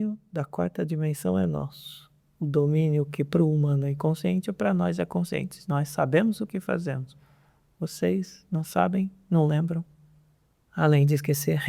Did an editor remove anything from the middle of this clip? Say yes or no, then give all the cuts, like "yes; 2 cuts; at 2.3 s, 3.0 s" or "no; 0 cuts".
no; 0 cuts